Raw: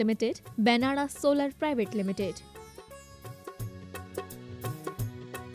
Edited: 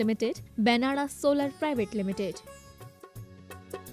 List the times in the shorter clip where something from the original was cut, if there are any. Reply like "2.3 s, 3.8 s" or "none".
2.4 s